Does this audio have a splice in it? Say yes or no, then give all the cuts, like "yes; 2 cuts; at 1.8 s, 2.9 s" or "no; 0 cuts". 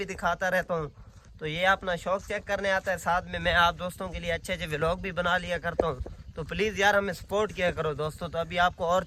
no; 0 cuts